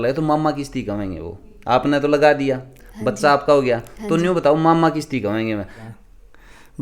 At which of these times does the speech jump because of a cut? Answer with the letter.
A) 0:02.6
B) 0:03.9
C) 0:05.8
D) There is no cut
C